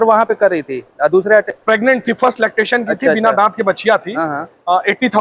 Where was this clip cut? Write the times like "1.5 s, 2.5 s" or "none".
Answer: none